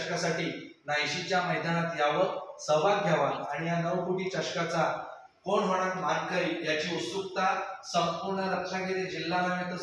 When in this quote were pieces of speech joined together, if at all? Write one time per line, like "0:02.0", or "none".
none